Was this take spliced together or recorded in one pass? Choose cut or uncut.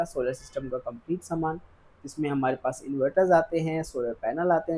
uncut